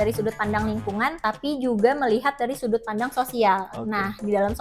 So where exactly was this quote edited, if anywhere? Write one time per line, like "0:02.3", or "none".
0:01.2